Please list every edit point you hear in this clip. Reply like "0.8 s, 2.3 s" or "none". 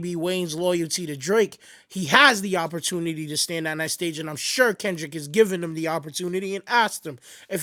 none